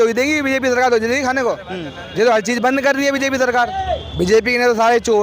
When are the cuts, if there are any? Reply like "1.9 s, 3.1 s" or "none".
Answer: 3.8 s